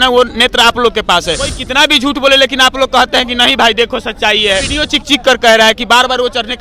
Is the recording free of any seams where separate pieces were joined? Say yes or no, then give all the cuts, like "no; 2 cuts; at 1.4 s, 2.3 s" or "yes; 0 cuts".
no; 2 cuts; at 1.6 s, 4.7 s